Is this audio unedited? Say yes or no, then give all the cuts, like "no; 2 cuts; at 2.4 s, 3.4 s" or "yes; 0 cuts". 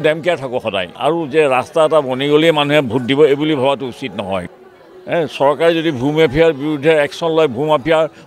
no; 2 cuts; at 0.9 s, 4.4 s